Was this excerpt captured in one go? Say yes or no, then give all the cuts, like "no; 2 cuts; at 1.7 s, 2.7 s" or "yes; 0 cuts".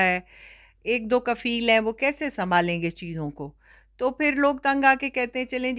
yes; 0 cuts